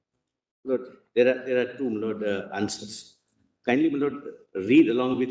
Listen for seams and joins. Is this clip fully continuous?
yes; 0 cuts

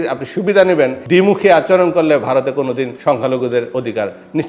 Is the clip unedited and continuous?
no; 2 cuts; at 1.0 s, 2.9 s

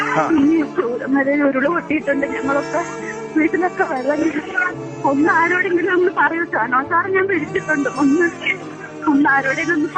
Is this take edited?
no; 0 cuts

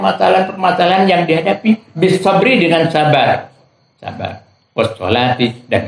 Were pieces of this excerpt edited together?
no; 0 cuts

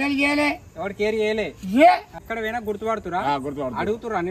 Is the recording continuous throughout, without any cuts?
no; 1 cut; at 2.2 s

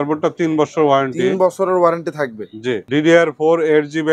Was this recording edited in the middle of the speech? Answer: yes; 1 cut; at 2.8 s

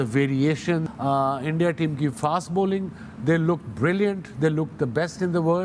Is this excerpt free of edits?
no; 1 cut; at 0.9 s

